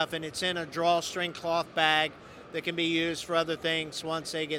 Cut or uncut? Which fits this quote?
uncut